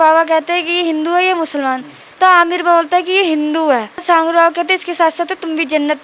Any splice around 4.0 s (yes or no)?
yes